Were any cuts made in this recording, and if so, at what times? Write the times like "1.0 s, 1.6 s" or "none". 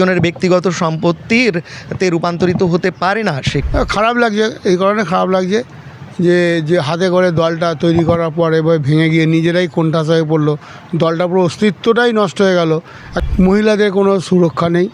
3.6 s, 13.1 s